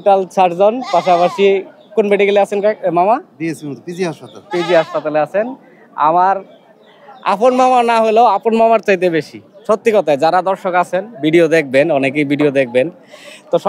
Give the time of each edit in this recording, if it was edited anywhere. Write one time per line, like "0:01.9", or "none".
none